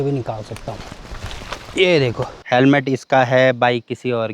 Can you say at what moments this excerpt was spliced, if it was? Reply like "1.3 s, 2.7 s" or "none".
2.4 s